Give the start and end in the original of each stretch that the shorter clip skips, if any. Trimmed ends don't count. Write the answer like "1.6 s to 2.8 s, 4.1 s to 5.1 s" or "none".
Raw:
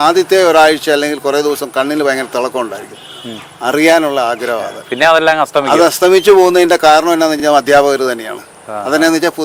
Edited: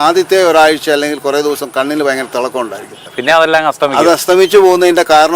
3.0 s to 4.8 s